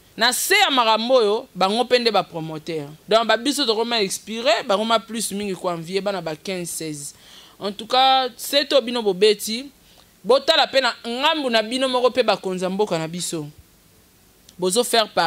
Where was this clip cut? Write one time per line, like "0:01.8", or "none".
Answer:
0:02.9